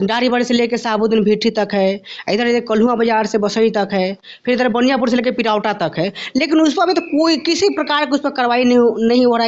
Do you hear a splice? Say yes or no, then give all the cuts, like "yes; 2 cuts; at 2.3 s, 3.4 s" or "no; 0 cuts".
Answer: no; 0 cuts